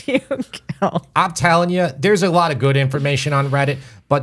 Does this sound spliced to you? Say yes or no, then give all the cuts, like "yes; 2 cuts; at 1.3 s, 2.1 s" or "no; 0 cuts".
yes; 1 cut; at 1.1 s